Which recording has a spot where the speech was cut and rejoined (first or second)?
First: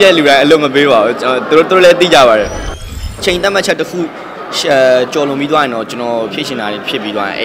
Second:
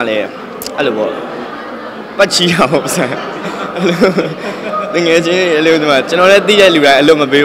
first